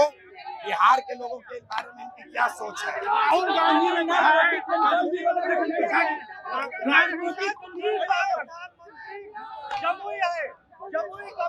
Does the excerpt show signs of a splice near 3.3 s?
no; 0 cuts

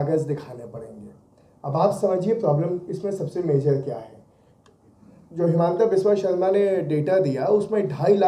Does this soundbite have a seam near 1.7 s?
no; 0 cuts

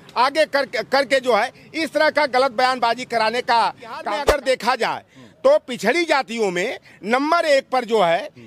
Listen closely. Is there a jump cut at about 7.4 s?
no; 1 cut; at 4.1 s

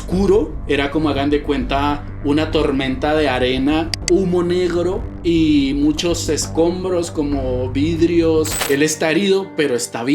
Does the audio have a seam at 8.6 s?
yes; 1 cut; at 8.6 s

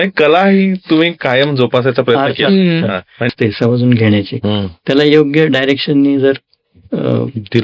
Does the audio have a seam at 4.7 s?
no; 1 cut; at 3.3 s

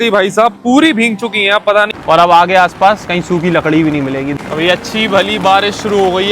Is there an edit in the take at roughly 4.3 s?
yes; 2 cuts; at 1.9 s, 4.3 s

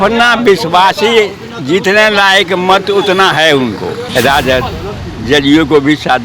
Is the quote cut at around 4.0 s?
yes; 1 cut; at 4.0 s

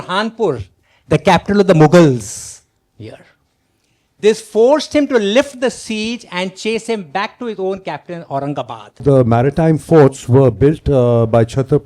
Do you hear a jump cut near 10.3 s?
no; 1 cut; at 9.0 s

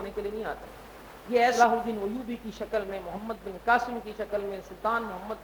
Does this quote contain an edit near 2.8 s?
no; 1 cut; at 1.6 s

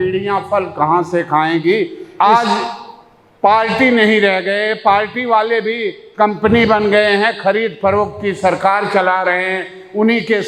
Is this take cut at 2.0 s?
yes; 1 cut; at 2.0 s

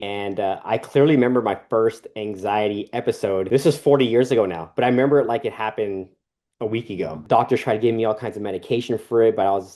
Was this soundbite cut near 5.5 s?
no; 1 cut; at 7.2 s

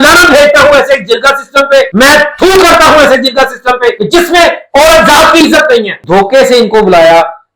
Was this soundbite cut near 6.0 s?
yes; 1 cut; at 6.0 s

